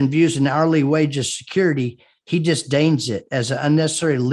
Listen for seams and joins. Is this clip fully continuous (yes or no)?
yes